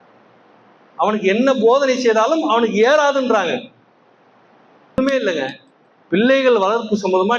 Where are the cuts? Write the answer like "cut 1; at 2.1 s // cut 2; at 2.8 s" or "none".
cut 1; at 5.0 s